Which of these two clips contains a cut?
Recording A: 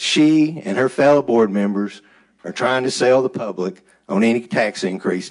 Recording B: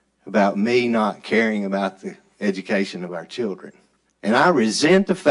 B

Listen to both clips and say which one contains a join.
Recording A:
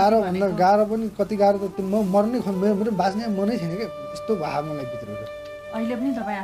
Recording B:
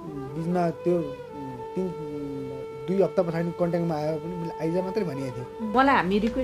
B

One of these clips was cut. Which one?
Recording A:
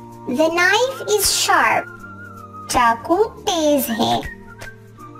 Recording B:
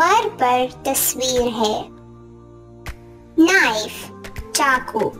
B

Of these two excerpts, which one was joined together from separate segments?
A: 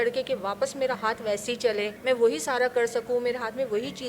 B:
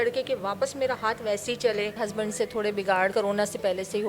B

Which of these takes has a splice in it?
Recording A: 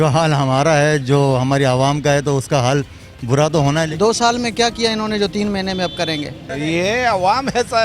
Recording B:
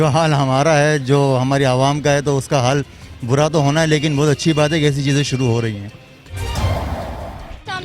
A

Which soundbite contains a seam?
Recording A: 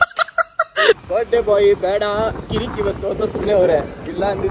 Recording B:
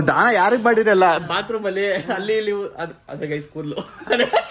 A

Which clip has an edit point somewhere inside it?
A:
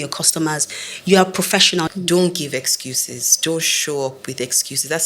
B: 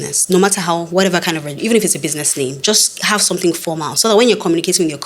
A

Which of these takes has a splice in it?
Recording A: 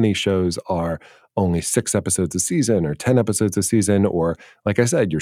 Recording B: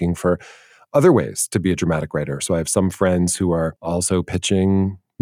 B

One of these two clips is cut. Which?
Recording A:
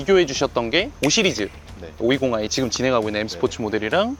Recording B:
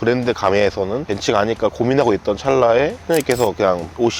B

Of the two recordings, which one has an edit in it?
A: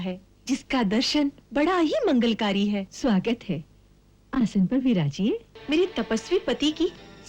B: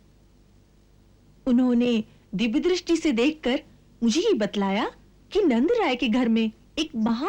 A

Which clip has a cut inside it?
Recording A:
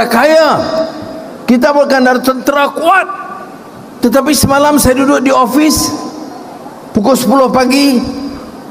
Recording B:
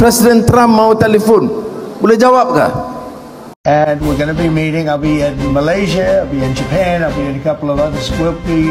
B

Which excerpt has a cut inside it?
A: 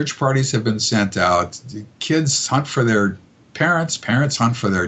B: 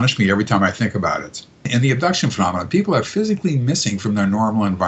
B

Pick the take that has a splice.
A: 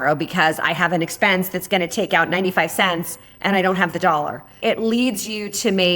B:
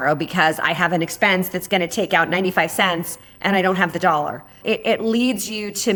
A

